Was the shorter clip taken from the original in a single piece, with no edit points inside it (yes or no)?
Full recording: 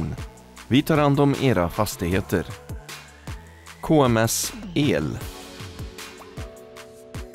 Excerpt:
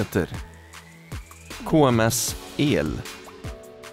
no